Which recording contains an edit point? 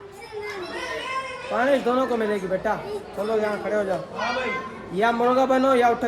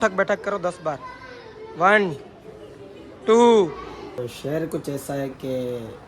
second; 1 cut; at 4.3 s

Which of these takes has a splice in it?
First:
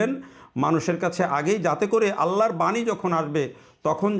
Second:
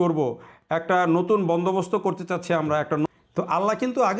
second; 1 cut; at 3.1 s

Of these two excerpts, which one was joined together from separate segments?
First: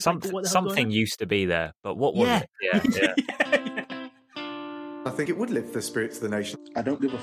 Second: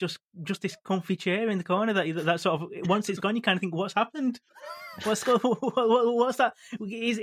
first; 1 cut; at 3.7 s

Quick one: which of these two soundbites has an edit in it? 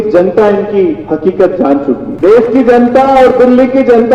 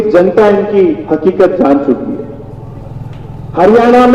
first; 1 cut; at 2.1 s

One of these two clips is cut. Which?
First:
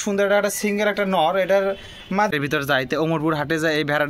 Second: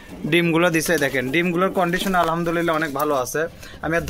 first; 1 cut; at 2.3 s

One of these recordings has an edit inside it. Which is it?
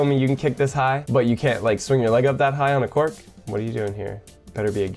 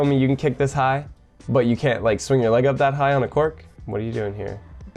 first; 1 cut; at 1.0 s

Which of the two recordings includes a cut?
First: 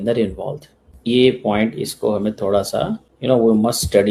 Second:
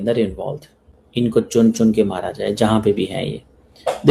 second; 1 cut; at 0.9 s

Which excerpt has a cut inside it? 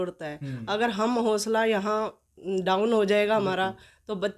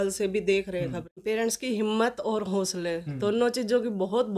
second; 1 cut; at 1.0 s

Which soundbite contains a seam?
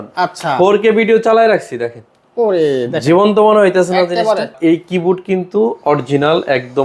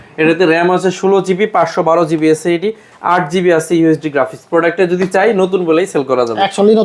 first; 1 cut; at 4.5 s

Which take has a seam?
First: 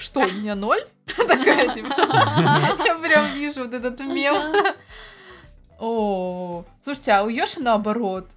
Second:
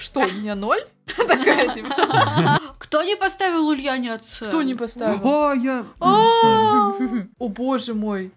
second; 2 cuts; at 2.6 s, 7.3 s

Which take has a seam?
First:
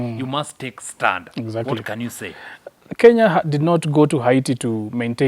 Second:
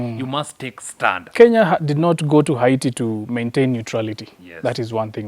second; 1 cut; at 1.2 s

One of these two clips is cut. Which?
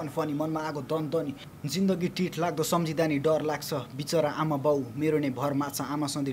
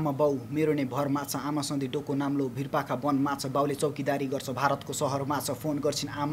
first; 1 cut; at 1.5 s

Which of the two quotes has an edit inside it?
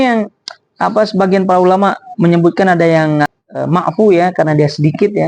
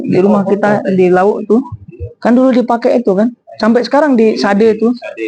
first; 1 cut; at 3.3 s

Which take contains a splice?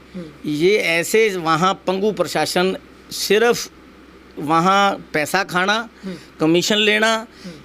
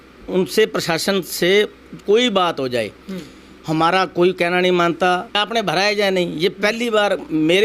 second; 1 cut; at 5.4 s

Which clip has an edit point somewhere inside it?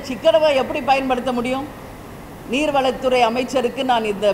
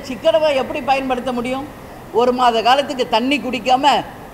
second; 1 cut; at 1.9 s

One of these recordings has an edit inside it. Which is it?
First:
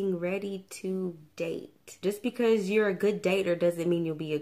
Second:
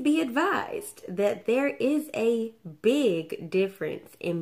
first; 1 cut; at 1.9 s

